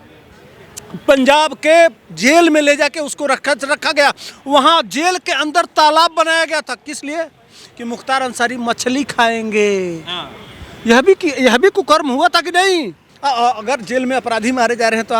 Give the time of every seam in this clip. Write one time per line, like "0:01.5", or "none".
0:13.0